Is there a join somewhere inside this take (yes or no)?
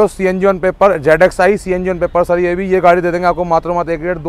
no